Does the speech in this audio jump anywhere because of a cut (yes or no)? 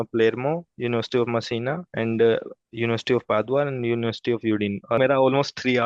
yes